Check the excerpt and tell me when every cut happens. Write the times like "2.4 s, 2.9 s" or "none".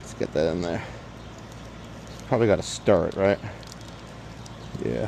none